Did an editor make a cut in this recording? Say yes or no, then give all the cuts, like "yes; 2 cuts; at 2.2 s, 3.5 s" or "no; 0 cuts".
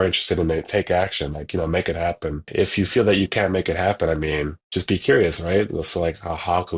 yes; 1 cut; at 2.5 s